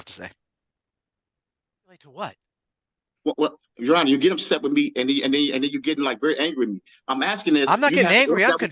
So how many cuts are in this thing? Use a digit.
1